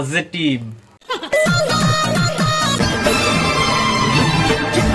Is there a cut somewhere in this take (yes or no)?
yes